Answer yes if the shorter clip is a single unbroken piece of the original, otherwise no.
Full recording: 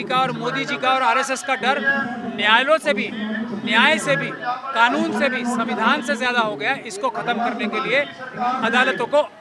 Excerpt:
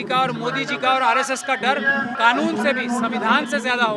no